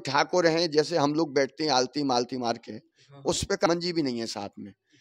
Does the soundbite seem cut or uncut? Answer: cut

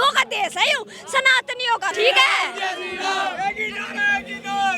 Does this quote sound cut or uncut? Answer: cut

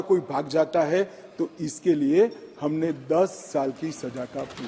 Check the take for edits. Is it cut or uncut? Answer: uncut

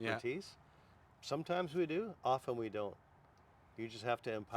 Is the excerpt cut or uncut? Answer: uncut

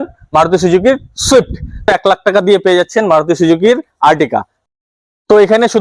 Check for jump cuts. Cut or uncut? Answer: cut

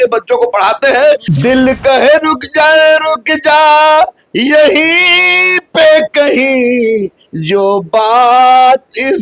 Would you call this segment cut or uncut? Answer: cut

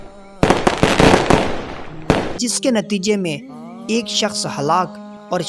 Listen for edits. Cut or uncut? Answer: uncut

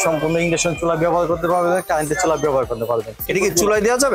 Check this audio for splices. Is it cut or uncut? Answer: cut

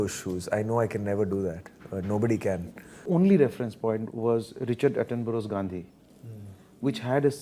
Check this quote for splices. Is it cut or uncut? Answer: cut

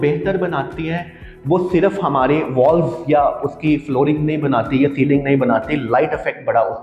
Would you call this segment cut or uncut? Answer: uncut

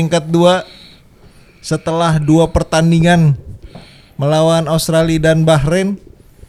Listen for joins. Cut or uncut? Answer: uncut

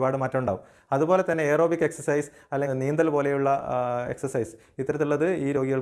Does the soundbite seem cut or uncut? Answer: uncut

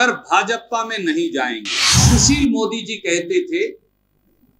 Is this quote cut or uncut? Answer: cut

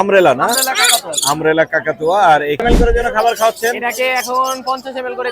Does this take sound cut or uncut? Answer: cut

